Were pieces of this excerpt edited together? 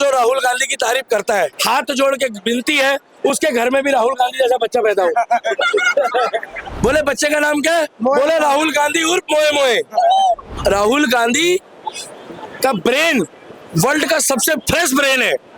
yes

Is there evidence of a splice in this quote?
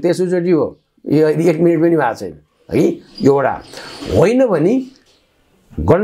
no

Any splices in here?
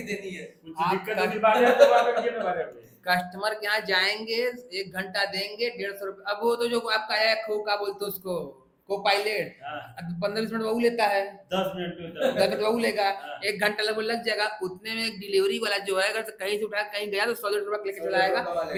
no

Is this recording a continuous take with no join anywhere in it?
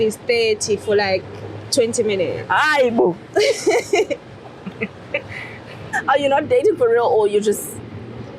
no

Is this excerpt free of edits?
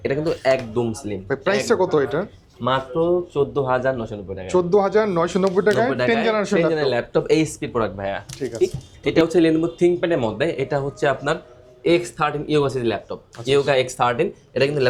yes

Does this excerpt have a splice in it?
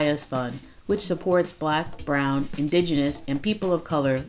no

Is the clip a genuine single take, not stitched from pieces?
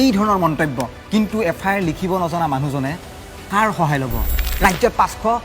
no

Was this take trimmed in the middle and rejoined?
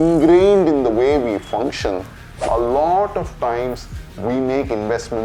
yes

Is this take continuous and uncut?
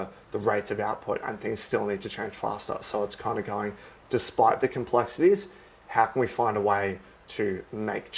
yes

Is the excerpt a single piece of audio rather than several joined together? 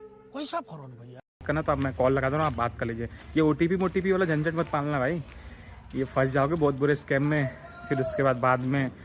no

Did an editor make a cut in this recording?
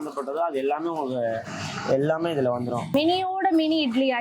yes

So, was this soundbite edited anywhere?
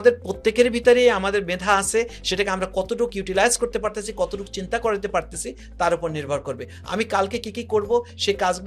no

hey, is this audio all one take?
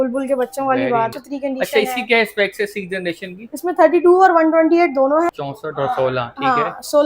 no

